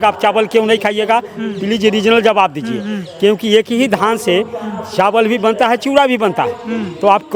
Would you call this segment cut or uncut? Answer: uncut